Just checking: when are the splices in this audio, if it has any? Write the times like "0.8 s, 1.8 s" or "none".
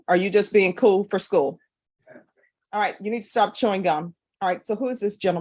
4.2 s